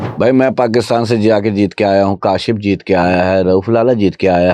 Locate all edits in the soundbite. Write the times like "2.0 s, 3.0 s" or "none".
none